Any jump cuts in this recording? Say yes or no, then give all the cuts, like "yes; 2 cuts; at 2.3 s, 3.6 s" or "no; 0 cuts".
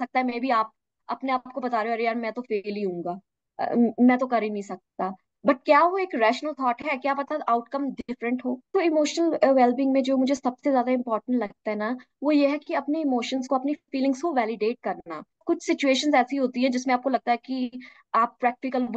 yes; 2 cuts; at 8.7 s, 15.4 s